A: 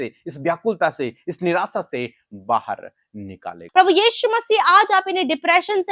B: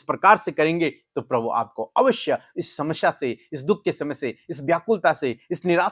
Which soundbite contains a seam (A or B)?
A